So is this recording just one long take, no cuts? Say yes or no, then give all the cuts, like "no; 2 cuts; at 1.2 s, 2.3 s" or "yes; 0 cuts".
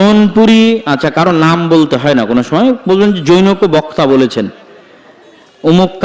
yes; 0 cuts